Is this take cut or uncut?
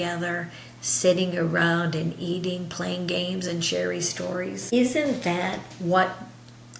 cut